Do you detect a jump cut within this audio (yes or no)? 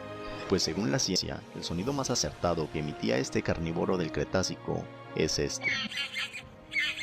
yes